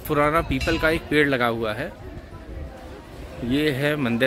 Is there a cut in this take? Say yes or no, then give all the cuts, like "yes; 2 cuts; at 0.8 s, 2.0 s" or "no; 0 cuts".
no; 0 cuts